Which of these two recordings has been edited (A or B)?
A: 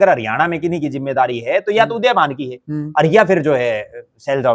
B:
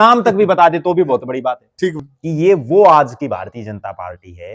B